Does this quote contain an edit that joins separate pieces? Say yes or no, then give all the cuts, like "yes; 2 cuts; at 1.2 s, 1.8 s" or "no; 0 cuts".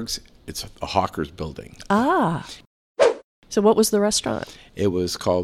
yes; 1 cut; at 3.2 s